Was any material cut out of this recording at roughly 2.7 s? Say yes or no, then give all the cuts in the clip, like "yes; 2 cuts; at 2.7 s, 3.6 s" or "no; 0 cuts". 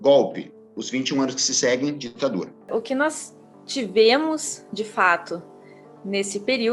yes; 1 cut; at 2.7 s